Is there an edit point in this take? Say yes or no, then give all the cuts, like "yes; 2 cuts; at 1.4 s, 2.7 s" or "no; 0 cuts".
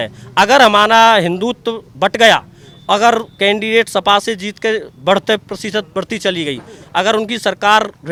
no; 0 cuts